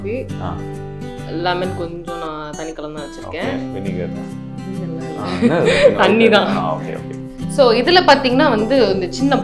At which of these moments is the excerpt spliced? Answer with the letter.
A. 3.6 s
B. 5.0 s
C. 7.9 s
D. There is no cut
D